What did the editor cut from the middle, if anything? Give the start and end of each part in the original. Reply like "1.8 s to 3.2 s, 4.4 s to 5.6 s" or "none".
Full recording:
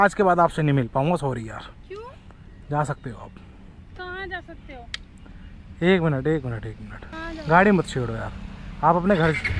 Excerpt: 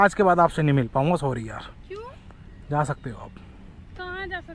none